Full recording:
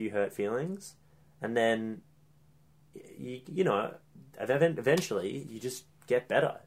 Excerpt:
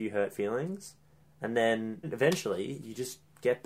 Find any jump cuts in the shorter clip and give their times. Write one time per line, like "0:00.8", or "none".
0:02.1